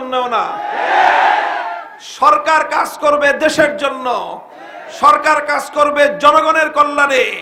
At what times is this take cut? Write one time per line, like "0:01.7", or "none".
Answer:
none